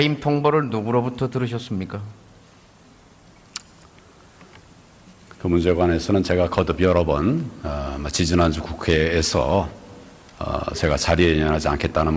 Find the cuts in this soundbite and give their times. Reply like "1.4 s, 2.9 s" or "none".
1.0 s